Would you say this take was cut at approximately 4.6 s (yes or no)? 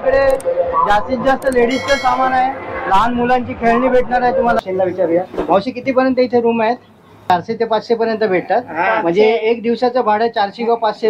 yes